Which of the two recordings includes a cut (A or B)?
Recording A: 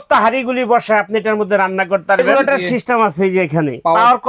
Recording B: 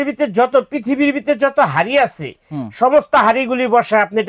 A